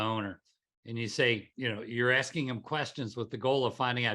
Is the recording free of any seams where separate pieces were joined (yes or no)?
no